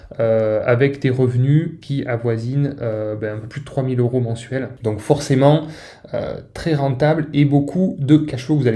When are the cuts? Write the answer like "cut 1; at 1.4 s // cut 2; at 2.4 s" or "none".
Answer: none

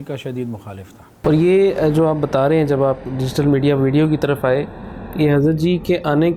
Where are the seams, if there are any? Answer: cut 1; at 1.1 s

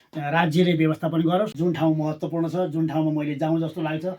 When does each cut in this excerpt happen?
cut 1; at 1.5 s

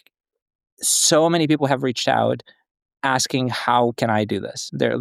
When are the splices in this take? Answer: none

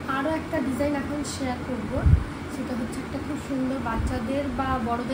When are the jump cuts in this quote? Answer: none

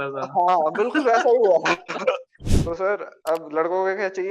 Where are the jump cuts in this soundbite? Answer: cut 1; at 2.3 s

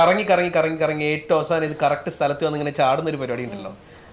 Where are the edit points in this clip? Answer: none

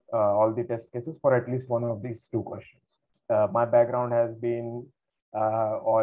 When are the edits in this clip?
cut 1; at 3.1 s

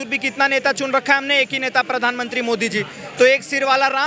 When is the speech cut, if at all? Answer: none

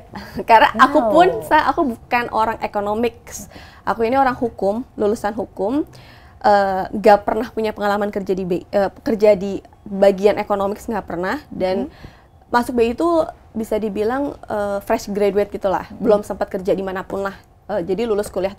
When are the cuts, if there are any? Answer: none

